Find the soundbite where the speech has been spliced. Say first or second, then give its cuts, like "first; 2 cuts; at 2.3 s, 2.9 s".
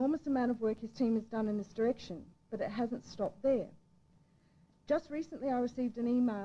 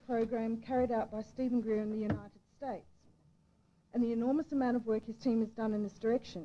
first; 1 cut; at 4.8 s